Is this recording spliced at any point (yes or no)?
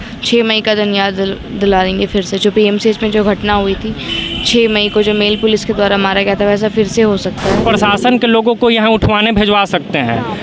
yes